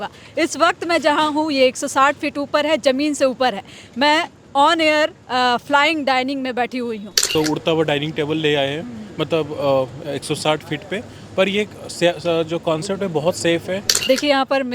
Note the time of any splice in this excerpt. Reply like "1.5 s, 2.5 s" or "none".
7.3 s, 14.0 s